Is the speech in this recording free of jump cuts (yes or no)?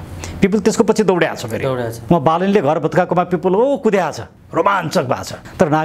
yes